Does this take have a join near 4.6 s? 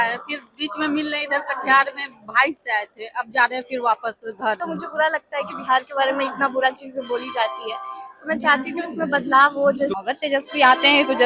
yes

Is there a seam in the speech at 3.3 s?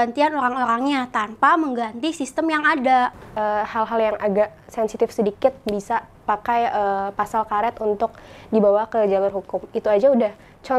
yes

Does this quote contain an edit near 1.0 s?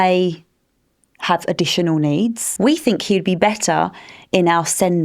no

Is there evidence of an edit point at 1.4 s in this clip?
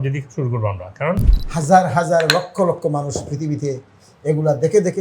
yes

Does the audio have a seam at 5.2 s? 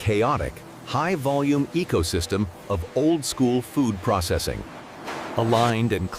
yes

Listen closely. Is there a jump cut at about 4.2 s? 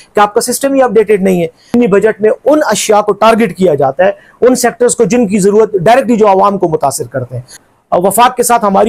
no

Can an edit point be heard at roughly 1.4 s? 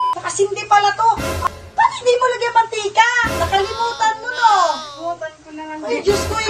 yes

